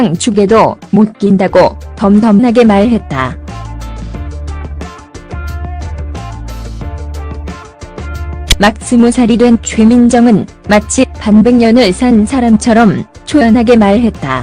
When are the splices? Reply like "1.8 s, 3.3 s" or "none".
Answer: 13.5 s